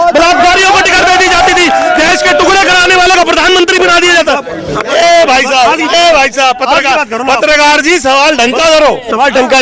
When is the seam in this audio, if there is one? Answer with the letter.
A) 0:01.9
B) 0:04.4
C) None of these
C